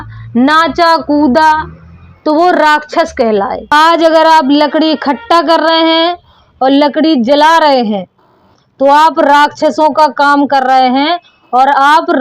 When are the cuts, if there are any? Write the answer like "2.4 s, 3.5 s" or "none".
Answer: 3.6 s